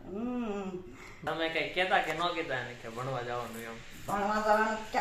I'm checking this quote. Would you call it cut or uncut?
cut